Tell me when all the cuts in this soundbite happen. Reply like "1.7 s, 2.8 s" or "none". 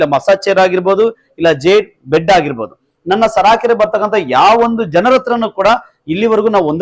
none